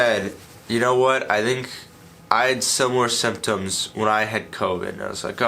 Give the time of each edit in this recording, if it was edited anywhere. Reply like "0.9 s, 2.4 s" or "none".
none